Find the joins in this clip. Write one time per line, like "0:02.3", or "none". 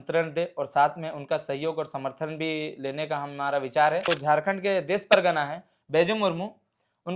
0:04.1